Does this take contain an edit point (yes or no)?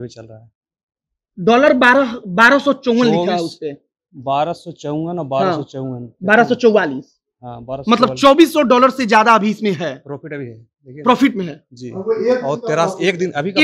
no